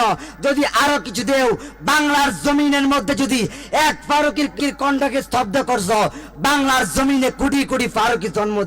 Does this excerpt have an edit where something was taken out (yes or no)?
yes